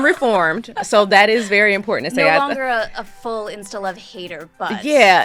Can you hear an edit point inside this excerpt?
no; 0 cuts

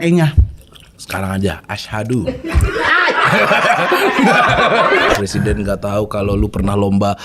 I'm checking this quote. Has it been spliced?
yes; 1 cut; at 5.1 s

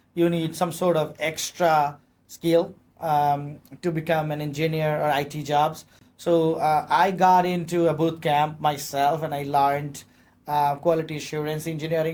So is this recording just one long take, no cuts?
yes; 0 cuts

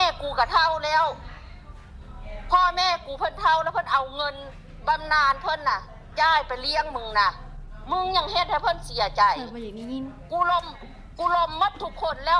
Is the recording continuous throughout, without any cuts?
yes; 0 cuts

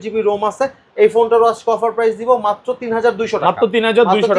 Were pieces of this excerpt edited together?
no; 0 cuts

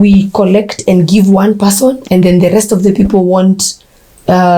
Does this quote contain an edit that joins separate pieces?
no; 0 cuts

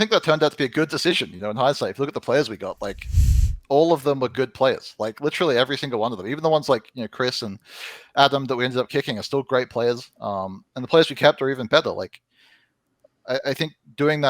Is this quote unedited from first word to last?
yes; 0 cuts

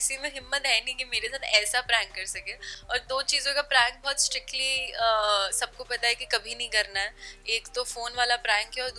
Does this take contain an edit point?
no; 0 cuts

